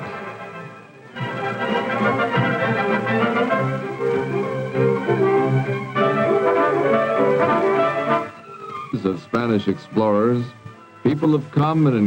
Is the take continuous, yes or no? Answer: yes